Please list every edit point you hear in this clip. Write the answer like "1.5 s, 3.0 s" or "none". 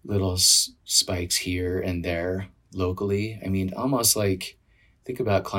none